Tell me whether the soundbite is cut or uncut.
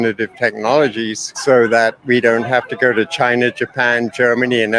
cut